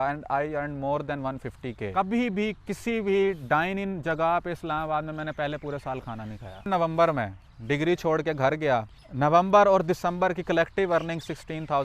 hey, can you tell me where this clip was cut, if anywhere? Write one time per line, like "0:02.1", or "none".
0:01.9
0:06.7
0:09.0